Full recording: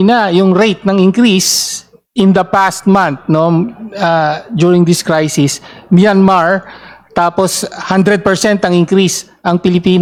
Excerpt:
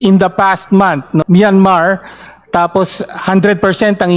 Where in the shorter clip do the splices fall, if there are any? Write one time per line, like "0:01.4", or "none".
0:01.2